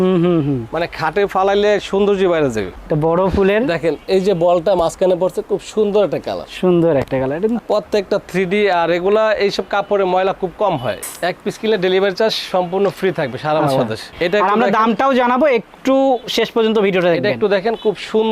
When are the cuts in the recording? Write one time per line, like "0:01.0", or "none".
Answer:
0:02.7
0:11.1
0:14.1